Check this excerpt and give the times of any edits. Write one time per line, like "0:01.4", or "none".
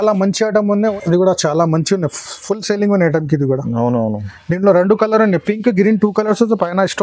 0:00.9

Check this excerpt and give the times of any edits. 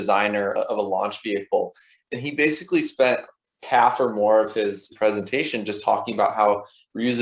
none

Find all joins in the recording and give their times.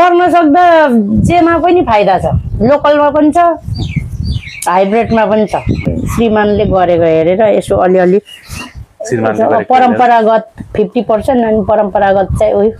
0:06.0

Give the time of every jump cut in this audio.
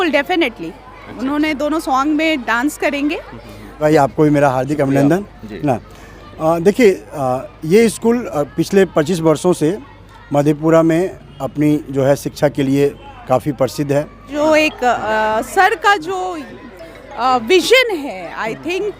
0:03.8
0:14.3

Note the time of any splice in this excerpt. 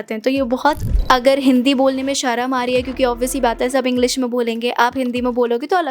0:00.9

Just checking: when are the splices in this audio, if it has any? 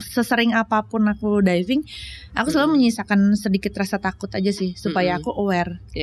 none

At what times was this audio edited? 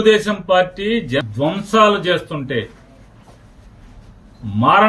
0:01.3

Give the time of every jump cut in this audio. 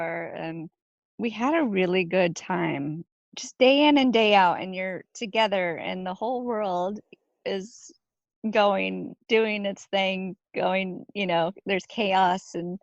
0:01.0
0:03.0

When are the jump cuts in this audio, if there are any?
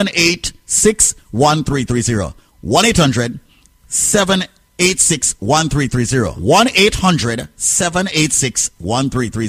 0:06.4

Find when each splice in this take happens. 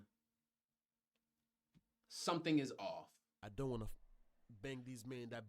0:03.4

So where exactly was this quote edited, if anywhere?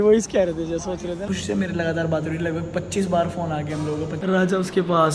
0:01.2
0:04.2

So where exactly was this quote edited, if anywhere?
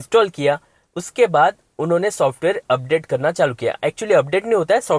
none

